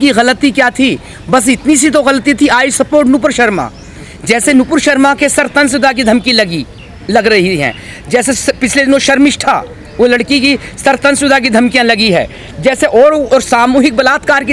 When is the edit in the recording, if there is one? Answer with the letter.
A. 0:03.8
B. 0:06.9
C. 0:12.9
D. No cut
D